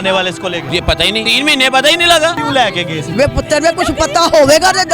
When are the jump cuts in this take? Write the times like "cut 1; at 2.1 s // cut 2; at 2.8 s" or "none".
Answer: cut 1; at 1.1 s // cut 2; at 2.7 s